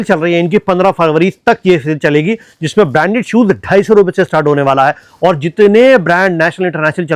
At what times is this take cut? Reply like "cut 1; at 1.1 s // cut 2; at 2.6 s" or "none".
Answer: none